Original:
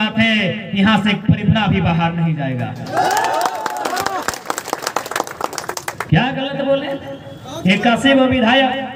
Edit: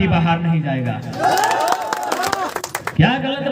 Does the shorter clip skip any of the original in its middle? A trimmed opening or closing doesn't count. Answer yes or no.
yes